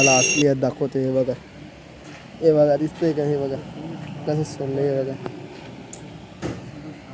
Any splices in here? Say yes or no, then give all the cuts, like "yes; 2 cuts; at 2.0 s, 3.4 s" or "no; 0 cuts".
no; 0 cuts